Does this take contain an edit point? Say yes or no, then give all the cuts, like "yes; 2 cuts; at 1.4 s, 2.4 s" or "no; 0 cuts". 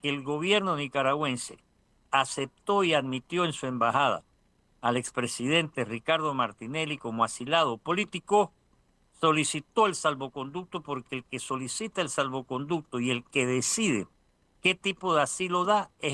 no; 0 cuts